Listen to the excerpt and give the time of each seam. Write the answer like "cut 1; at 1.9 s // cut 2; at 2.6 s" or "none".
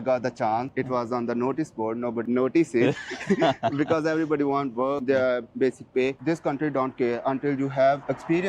cut 1; at 2.2 s // cut 2; at 6.2 s